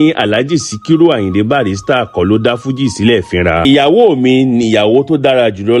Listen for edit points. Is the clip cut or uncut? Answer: cut